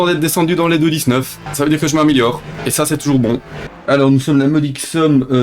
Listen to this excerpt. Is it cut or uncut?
cut